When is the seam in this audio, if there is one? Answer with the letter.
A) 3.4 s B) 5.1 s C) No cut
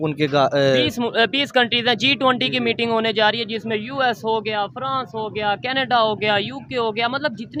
C